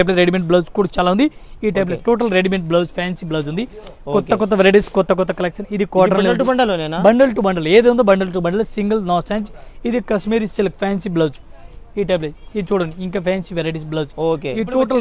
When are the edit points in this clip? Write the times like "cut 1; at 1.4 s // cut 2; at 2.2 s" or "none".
none